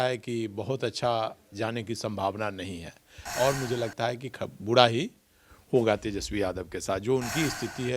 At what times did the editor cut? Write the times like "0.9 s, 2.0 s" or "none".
3.2 s